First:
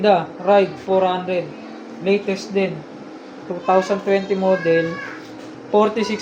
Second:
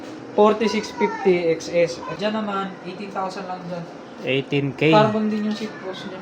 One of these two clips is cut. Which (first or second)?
second